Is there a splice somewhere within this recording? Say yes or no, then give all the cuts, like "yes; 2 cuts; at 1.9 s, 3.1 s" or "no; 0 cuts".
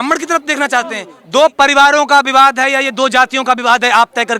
yes; 1 cut; at 1.1 s